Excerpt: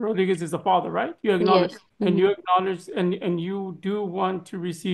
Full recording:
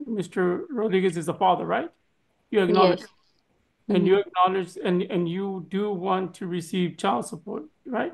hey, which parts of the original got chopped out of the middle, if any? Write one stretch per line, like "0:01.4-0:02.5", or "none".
0:01.9-0:02.4
0:03.1-0:03.7